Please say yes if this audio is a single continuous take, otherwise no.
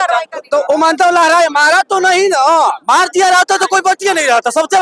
yes